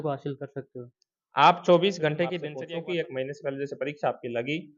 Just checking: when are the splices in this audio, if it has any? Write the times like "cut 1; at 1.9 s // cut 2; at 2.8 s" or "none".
cut 1; at 2.5 s

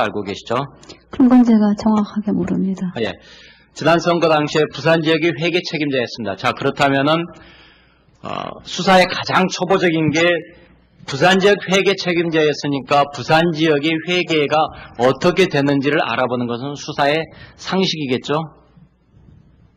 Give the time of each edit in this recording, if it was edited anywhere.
none

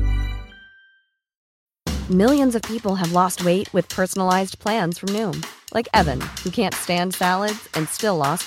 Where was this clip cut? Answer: cut 1; at 1.5 s

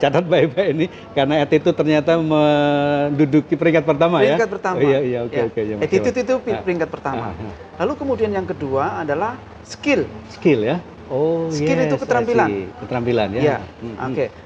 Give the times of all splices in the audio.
none

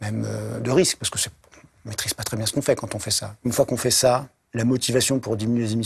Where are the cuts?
cut 1; at 3.3 s // cut 2; at 4.4 s

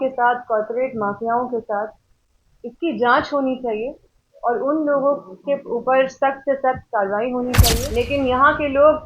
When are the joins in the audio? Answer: cut 1; at 7.9 s

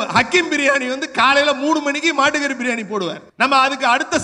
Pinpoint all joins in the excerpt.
cut 1; at 3.2 s

